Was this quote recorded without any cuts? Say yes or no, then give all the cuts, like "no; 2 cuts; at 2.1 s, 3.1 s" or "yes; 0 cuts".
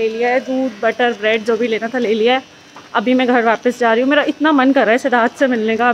yes; 0 cuts